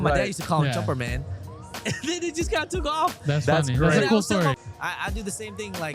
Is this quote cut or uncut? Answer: cut